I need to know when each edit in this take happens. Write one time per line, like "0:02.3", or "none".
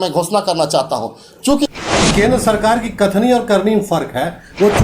0:01.7